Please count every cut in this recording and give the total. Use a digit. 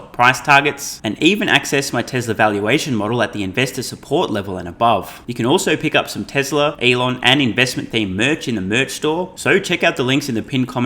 3